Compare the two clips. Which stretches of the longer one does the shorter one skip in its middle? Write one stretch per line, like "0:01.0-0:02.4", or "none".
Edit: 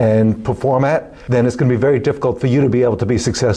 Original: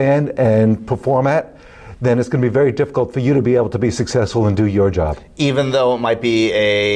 0:01.6-0:01.9